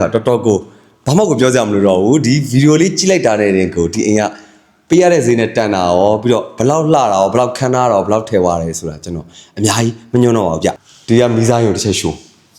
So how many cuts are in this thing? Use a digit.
1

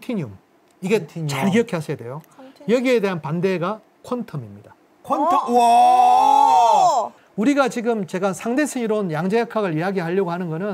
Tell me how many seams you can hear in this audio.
0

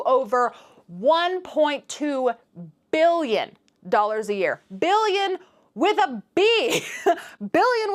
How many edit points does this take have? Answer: 0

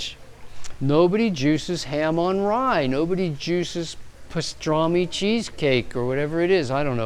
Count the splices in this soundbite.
1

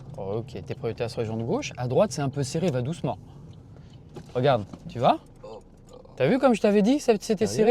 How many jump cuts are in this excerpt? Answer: 0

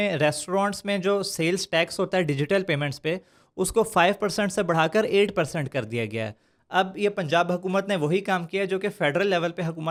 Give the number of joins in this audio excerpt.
0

